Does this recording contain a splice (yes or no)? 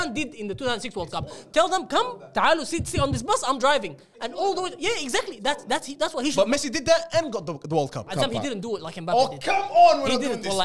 yes